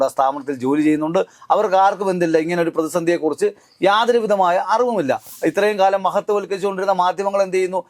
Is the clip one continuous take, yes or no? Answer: no